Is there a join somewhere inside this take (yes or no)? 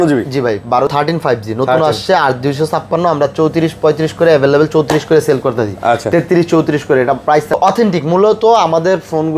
yes